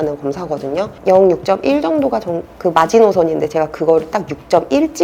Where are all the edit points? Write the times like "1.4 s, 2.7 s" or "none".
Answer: 1.0 s